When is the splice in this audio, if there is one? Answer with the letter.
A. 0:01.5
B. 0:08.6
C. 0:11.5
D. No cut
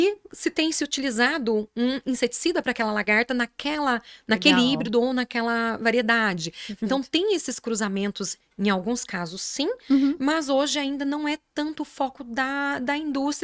D